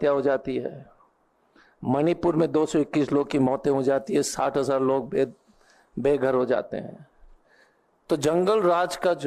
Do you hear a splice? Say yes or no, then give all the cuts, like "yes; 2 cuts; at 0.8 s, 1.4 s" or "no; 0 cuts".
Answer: no; 0 cuts